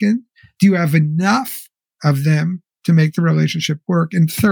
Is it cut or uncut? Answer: uncut